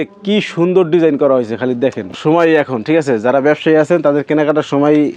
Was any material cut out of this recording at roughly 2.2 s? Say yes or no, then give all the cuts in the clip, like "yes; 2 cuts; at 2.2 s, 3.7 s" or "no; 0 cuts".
yes; 1 cut; at 2.2 s